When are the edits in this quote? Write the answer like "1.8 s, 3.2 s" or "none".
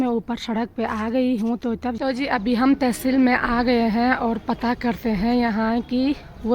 2.0 s